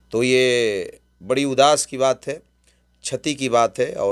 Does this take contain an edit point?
no; 0 cuts

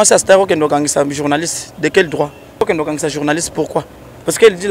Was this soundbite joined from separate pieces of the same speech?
yes; 1 cut; at 2.6 s

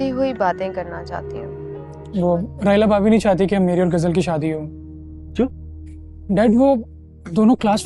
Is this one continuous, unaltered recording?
no; 1 cut; at 1.9 s

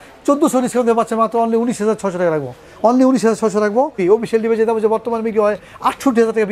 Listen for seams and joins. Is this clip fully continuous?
no; 1 cut; at 4.0 s

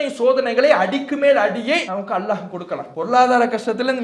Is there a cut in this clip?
yes; 2 cuts; at 1.9 s, 2.9 s

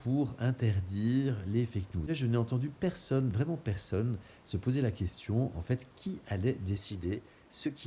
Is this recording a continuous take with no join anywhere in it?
no; 1 cut; at 2.0 s

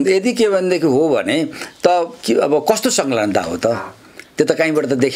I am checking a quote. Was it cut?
no; 0 cuts

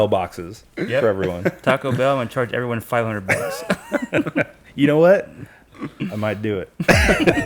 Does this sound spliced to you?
no; 0 cuts

